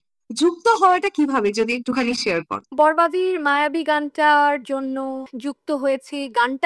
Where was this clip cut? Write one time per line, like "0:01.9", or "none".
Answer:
none